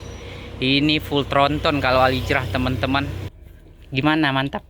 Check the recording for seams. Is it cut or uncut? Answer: cut